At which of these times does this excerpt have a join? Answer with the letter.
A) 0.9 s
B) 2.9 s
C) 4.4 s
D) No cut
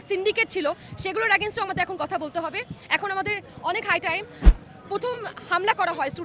C